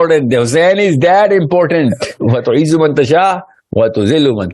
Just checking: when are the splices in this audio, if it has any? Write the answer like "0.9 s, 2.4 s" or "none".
2.1 s